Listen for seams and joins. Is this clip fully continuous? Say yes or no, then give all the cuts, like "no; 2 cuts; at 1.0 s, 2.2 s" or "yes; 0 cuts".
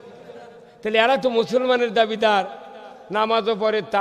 yes; 0 cuts